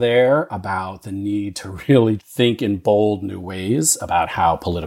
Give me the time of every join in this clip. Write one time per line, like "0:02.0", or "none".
none